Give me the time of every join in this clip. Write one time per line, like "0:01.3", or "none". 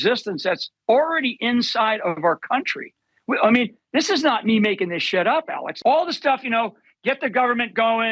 0:05.6